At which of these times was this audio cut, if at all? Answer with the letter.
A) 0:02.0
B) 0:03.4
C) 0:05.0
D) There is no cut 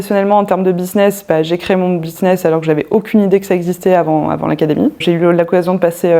C